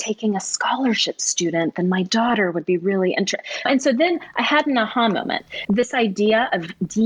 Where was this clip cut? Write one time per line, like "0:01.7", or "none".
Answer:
0:03.7
0:05.5